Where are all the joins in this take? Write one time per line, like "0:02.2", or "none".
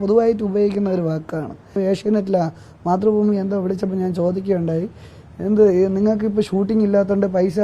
0:01.8